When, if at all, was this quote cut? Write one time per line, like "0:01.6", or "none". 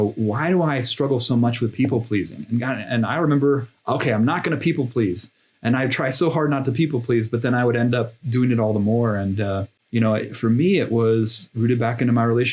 0:09.7